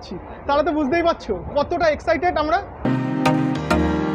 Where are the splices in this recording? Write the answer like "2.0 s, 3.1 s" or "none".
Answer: 2.9 s